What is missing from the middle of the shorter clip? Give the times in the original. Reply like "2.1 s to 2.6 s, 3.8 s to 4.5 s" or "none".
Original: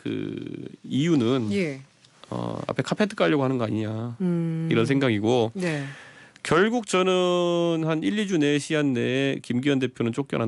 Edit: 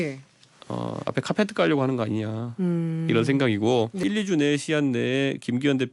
5.6 s to 8.0 s